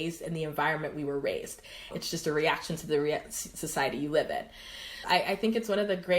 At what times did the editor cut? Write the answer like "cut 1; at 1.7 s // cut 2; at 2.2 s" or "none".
cut 1; at 1.9 s // cut 2; at 4.9 s